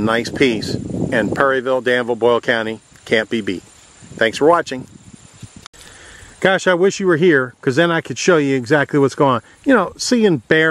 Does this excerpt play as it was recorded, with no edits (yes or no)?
yes